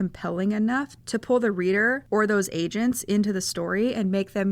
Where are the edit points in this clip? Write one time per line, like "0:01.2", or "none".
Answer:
0:01.0

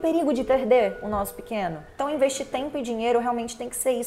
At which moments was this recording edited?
0:01.9

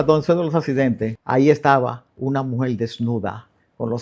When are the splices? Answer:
0:01.2

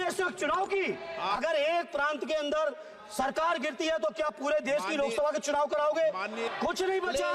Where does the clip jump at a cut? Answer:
0:01.3
0:06.4

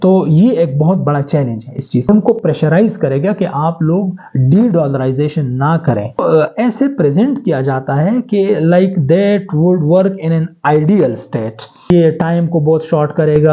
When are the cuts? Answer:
0:02.1
0:06.2
0:11.9

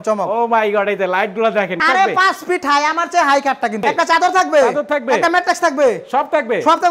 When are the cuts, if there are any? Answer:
0:01.8
0:03.8

